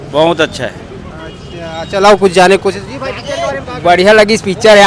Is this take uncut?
yes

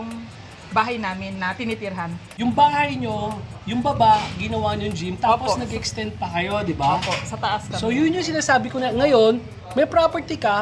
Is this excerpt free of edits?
no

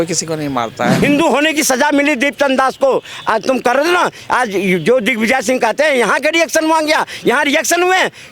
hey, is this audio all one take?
no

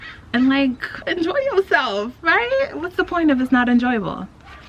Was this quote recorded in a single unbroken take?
yes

